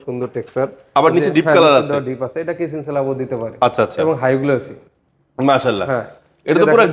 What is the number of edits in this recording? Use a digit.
0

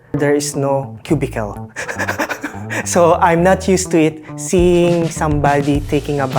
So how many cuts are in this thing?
1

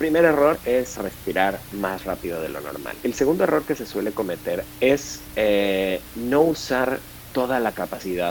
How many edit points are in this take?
3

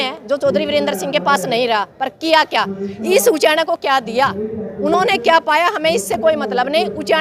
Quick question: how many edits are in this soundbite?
0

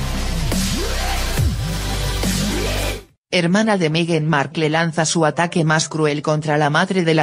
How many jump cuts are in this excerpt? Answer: 0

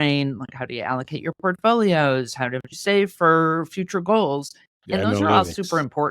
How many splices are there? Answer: 1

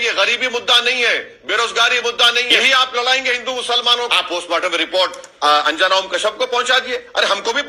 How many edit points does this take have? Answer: 2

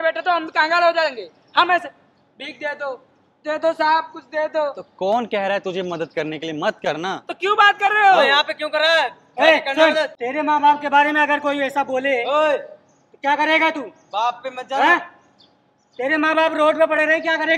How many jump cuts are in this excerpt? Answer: 0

